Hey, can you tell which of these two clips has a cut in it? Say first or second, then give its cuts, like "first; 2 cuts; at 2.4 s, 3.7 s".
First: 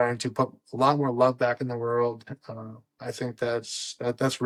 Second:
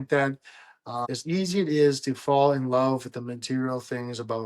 second; 1 cut; at 1.1 s